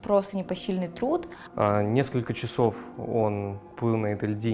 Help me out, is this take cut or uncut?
cut